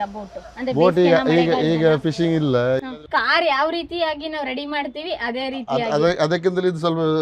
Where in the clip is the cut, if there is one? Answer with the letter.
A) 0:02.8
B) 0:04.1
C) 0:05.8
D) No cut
A